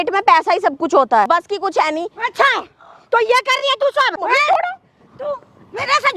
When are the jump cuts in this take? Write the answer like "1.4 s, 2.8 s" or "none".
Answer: 1.3 s, 4.2 s